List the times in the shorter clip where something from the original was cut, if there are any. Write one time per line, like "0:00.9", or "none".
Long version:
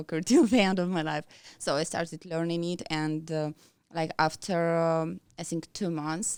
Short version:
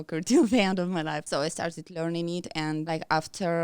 0:01.2
0:02.9

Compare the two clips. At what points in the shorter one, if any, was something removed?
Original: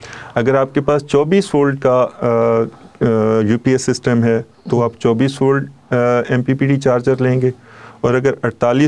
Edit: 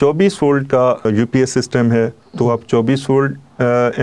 0:01.1

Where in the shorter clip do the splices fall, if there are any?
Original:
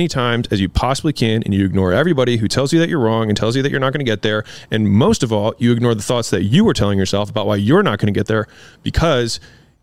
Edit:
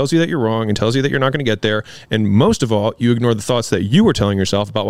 none

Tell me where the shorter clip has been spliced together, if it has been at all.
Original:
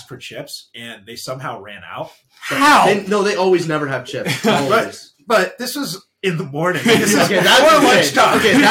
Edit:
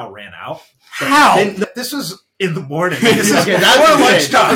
0:01.6

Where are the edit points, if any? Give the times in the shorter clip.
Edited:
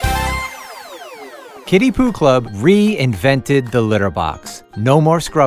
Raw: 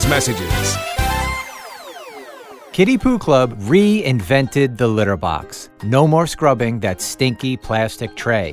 0:01.5

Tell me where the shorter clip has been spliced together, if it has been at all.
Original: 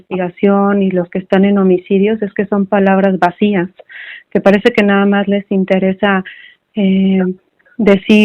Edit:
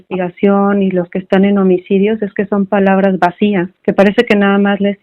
0:03.7

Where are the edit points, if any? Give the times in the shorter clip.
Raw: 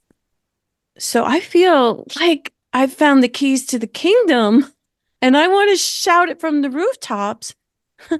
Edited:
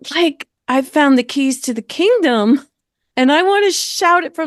none

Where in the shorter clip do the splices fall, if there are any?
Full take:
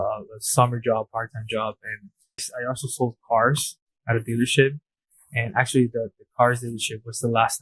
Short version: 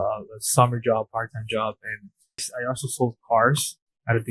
none

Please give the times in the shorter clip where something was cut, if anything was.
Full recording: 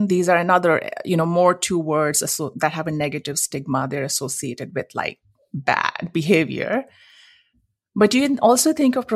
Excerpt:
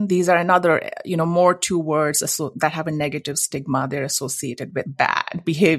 0:04.9

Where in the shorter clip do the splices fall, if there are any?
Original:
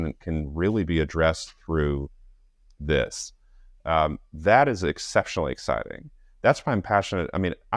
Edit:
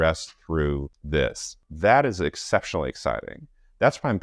0:00.9
0:01.6

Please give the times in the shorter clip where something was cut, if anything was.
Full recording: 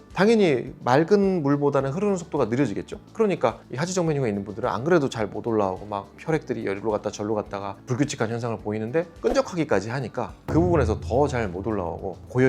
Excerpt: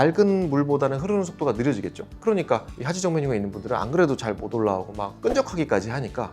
0:05.1

